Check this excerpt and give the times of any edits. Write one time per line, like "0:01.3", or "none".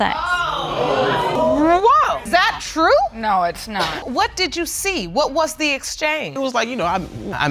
0:01.3
0:02.2
0:04.0